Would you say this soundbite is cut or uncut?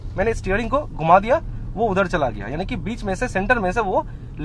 uncut